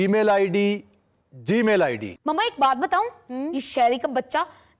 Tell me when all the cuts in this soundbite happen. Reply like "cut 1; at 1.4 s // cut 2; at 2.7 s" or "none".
cut 1; at 2.1 s